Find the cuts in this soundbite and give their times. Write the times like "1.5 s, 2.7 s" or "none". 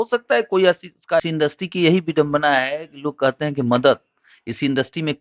1.2 s